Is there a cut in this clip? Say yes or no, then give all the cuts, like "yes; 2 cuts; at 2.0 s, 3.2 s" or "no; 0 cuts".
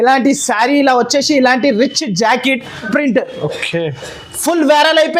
yes; 1 cut; at 2.8 s